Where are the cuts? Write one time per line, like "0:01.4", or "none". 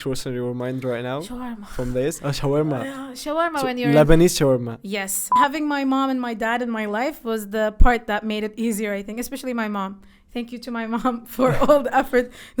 0:05.2